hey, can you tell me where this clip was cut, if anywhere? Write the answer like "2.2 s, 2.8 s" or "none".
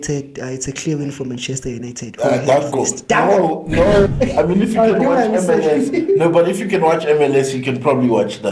4.1 s